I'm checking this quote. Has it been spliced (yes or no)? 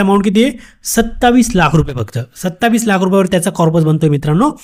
no